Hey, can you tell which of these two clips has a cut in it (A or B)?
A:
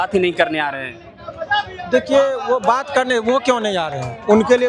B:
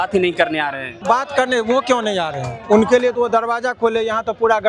B